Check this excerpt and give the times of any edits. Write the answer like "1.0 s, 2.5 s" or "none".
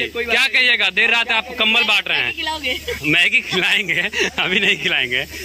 none